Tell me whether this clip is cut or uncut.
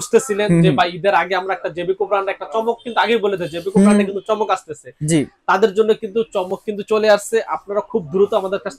uncut